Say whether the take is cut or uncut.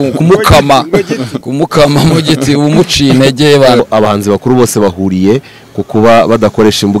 cut